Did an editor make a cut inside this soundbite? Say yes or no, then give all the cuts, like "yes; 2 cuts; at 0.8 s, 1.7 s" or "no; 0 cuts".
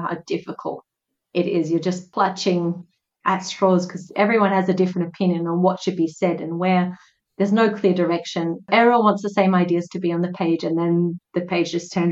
yes; 1 cut; at 2.0 s